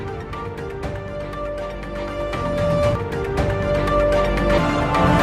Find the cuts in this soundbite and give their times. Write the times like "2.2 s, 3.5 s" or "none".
1.2 s